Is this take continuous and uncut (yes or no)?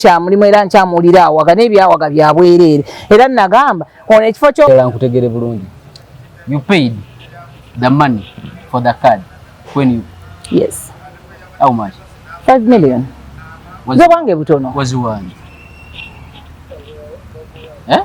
no